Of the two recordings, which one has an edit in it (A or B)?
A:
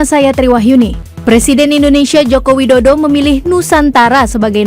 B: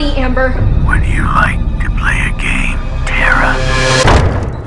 A